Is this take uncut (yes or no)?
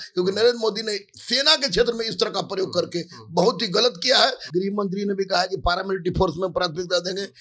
no